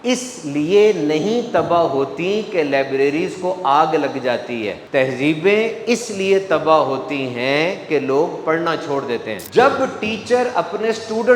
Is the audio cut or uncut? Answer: cut